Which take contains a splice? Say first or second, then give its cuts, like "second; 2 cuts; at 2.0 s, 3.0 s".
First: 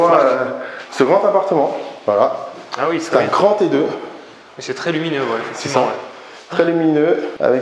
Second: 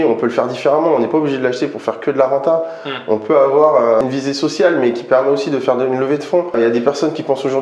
second; 2 cuts; at 4.0 s, 6.5 s